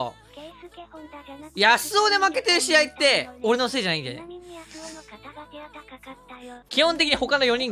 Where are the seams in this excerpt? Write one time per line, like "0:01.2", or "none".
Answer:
0:06.5